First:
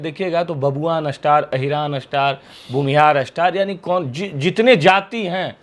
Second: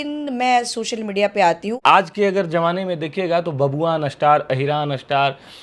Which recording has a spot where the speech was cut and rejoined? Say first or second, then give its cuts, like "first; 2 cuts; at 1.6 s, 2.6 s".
second; 1 cut; at 1.8 s